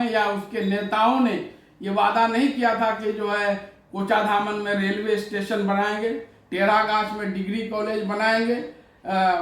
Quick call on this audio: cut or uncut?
uncut